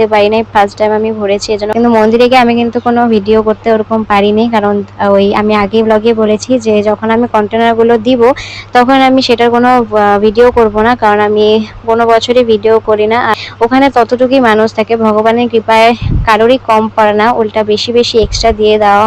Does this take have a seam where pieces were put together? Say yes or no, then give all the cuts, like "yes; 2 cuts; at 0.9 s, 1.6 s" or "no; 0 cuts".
yes; 2 cuts; at 1.7 s, 13.3 s